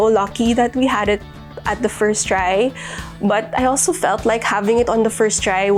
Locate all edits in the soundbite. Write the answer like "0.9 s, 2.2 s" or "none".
none